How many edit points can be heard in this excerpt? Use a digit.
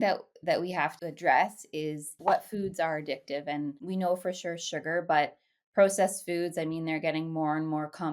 3